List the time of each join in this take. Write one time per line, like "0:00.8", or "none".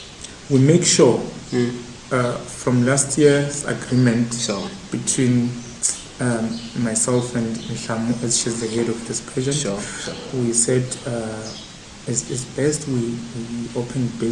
none